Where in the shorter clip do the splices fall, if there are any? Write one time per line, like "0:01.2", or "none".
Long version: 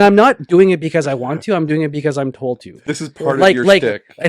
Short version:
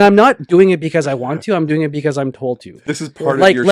none

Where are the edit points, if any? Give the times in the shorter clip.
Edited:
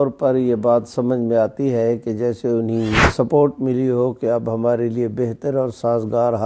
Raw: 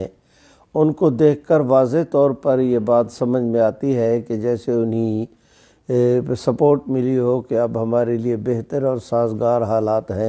0:03.1

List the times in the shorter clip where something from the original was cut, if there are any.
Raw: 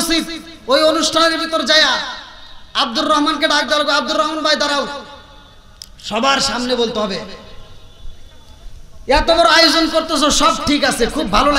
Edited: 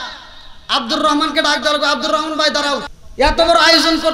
0:03.0

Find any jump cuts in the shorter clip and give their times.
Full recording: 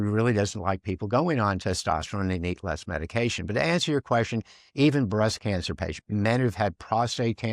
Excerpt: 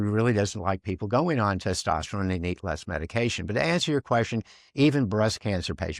none

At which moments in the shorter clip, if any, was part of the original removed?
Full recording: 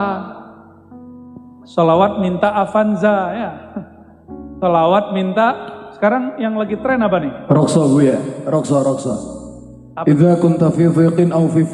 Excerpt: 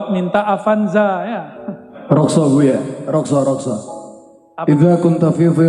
0:01.9

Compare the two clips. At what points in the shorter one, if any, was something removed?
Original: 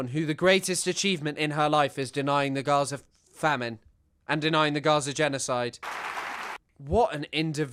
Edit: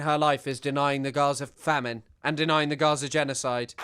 0:01.8

